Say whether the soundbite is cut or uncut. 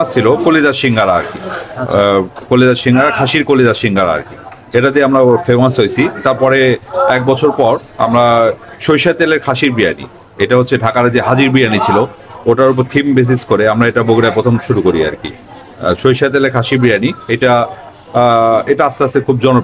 uncut